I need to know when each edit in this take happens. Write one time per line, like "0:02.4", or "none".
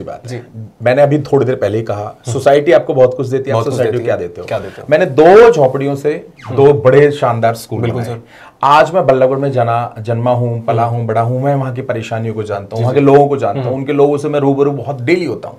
none